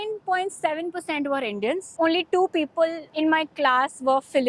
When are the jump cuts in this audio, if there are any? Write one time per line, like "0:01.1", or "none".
0:01.9
0:03.0